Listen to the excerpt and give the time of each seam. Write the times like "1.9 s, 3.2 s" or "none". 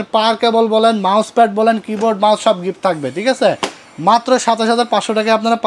none